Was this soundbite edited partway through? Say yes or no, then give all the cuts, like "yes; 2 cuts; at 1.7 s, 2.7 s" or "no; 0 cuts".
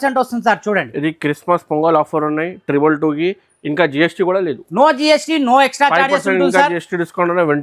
no; 0 cuts